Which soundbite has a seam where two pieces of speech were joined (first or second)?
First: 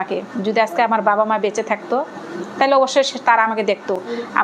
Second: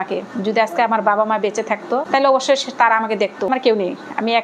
second